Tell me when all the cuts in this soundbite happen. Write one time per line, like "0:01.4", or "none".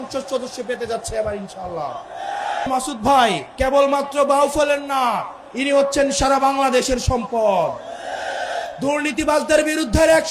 0:02.7
0:03.5
0:08.7